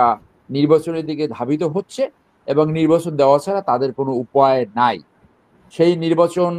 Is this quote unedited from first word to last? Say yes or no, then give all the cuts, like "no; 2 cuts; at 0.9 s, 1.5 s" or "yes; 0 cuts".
yes; 0 cuts